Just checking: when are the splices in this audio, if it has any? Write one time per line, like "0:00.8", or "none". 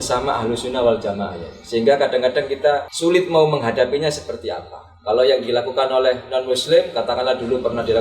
0:02.9